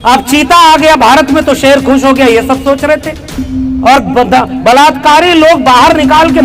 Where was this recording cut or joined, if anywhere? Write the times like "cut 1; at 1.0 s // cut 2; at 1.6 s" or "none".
cut 1; at 3.5 s